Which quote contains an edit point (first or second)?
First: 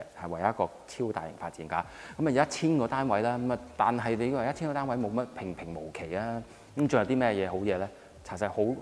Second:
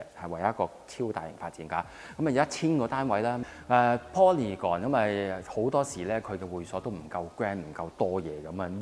second